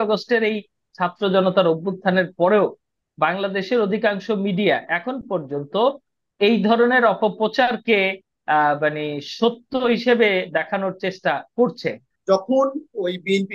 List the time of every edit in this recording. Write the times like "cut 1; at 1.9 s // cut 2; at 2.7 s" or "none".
cut 1; at 12.1 s